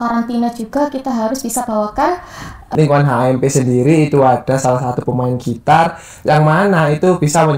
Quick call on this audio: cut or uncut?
cut